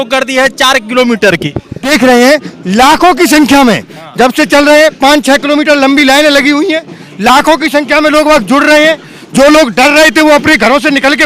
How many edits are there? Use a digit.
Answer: 1